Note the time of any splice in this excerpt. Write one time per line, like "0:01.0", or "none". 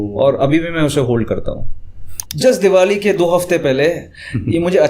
0:02.2